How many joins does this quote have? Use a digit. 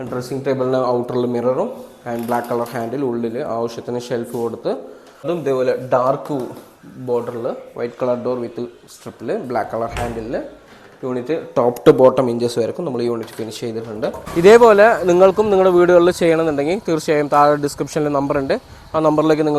2